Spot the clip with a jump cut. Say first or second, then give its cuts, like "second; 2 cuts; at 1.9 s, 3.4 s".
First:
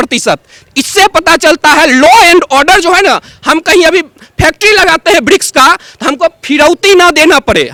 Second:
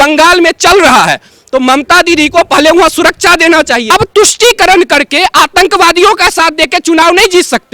second; 1 cut; at 3.8 s